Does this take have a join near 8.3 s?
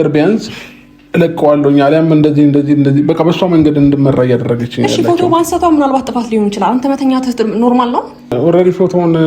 yes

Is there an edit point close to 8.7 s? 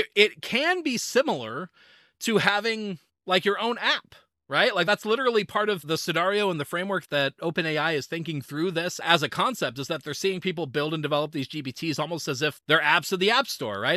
no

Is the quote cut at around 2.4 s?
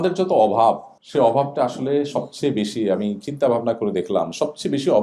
no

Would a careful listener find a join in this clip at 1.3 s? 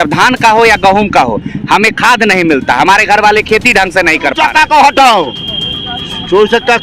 no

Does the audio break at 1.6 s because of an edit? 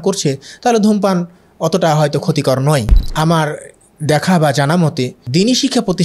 no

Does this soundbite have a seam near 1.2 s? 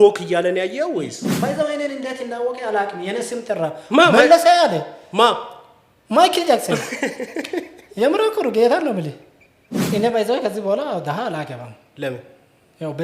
yes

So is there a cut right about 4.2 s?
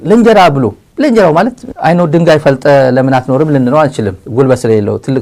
yes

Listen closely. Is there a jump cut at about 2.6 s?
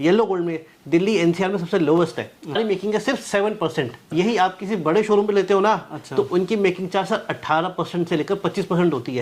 yes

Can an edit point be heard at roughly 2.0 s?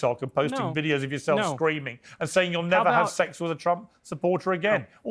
no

